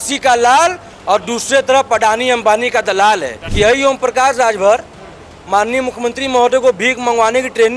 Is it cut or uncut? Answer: cut